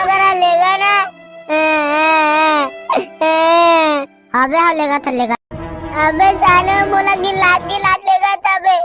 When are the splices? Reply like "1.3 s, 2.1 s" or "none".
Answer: 5.4 s